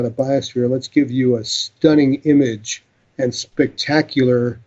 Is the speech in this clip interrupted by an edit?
yes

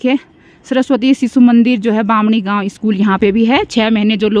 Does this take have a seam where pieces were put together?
no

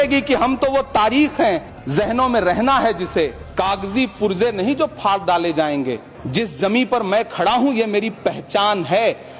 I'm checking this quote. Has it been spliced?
yes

